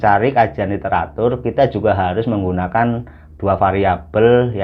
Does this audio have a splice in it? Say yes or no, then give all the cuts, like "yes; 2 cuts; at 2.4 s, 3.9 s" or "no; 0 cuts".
no; 0 cuts